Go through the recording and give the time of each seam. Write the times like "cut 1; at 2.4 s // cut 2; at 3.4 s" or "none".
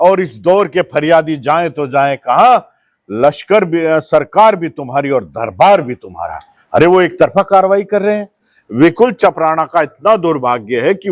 cut 1; at 8.5 s